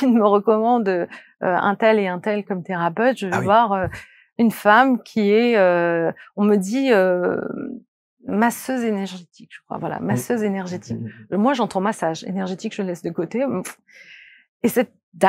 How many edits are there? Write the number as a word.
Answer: zero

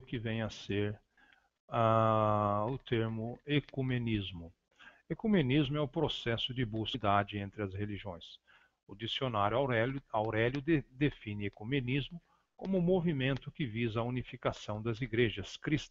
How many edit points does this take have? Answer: zero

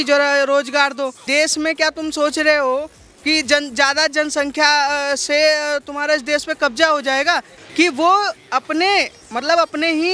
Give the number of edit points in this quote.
two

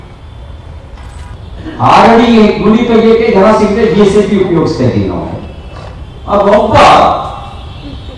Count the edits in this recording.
one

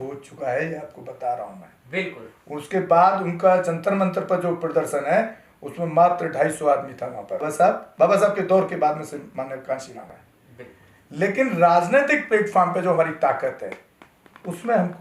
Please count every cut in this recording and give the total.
two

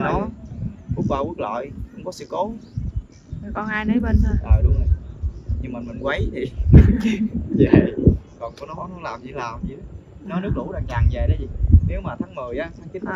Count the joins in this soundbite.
zero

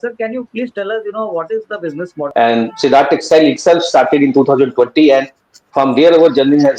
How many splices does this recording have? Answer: one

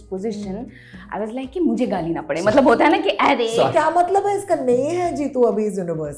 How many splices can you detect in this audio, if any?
one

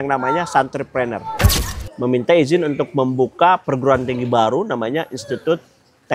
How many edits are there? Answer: one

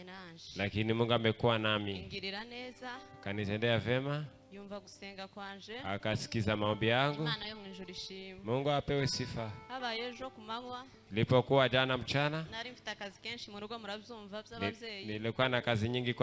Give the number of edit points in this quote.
zero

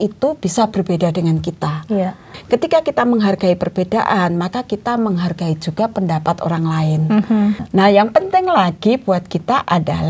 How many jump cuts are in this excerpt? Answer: two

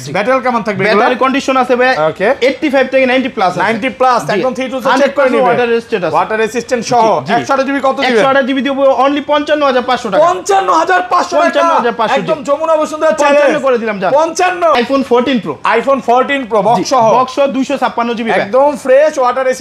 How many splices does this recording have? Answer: one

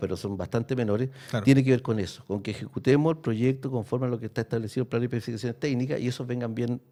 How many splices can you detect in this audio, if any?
zero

